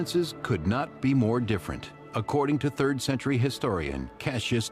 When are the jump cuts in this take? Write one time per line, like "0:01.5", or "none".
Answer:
0:03.6